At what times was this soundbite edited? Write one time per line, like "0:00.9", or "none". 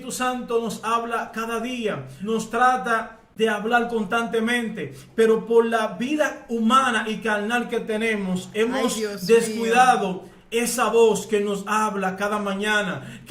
0:02.1
0:03.2